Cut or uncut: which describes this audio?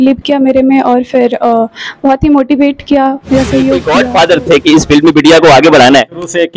cut